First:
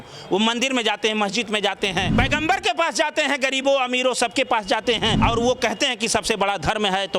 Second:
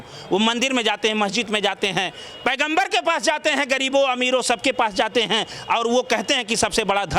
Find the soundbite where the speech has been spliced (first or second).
first